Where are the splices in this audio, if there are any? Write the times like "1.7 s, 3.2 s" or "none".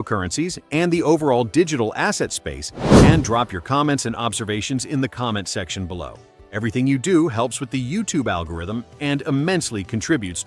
none